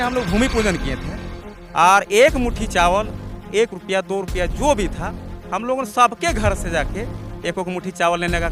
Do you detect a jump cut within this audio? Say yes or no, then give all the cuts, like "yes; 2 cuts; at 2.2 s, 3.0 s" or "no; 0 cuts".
no; 0 cuts